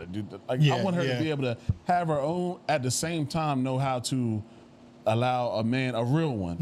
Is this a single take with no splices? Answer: yes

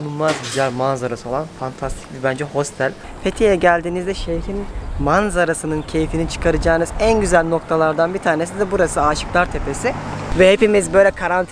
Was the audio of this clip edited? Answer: yes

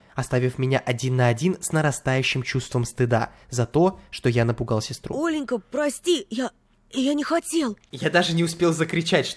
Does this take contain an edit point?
yes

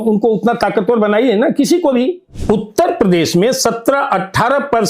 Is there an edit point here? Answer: yes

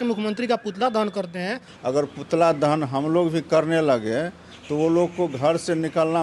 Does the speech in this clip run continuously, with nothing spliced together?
no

